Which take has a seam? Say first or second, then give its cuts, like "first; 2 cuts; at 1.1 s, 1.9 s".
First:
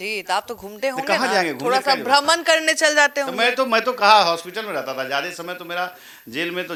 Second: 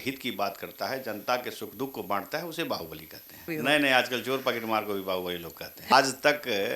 second; 2 cuts; at 3.5 s, 5.9 s